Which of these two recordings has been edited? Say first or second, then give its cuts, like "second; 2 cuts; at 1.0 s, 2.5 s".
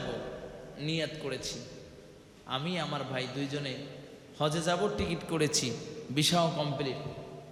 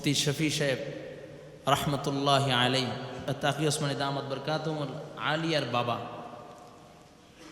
second; 1 cut; at 3.3 s